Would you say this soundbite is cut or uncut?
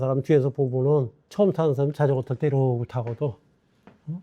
cut